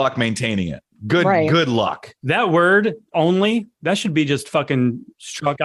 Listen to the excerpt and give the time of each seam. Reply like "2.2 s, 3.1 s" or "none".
3.1 s

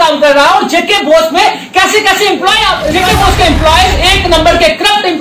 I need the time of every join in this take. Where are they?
2.9 s

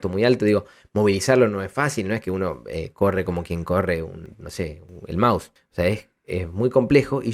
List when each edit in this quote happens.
4.7 s, 5.6 s

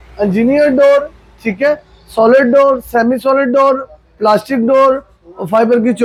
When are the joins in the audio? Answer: none

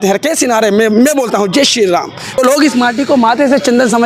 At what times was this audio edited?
2.4 s

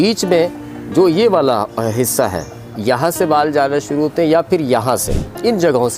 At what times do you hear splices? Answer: none

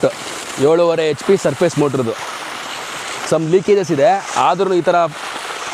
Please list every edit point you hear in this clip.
none

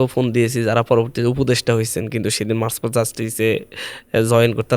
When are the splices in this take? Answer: none

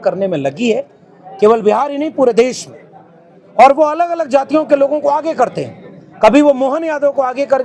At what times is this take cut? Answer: none

